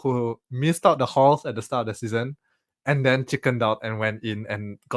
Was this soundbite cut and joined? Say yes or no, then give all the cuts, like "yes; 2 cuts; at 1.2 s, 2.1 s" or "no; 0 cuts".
no; 0 cuts